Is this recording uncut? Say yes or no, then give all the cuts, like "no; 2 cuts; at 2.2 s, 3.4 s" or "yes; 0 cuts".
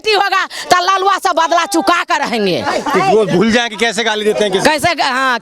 yes; 0 cuts